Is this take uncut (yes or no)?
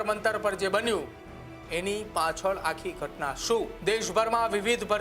no